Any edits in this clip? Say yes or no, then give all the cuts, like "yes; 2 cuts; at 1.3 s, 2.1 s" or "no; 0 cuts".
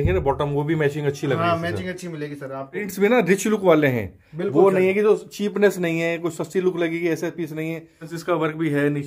yes; 2 cuts; at 2.9 s, 8.1 s